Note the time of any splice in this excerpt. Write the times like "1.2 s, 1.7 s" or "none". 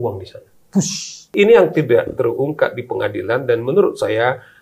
1.3 s